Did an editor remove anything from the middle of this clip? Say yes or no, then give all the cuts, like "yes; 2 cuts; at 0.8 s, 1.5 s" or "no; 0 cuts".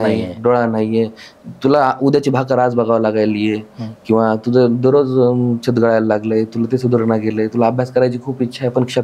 no; 0 cuts